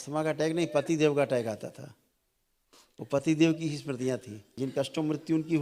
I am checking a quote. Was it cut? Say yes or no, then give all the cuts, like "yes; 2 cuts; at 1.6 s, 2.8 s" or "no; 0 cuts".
yes; 1 cut; at 4.6 s